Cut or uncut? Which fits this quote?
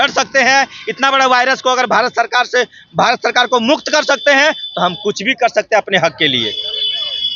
uncut